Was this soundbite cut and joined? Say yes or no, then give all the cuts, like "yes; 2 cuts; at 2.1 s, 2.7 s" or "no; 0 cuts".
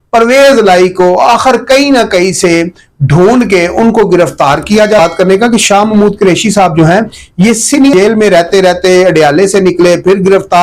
yes; 2 cuts; at 5.0 s, 7.9 s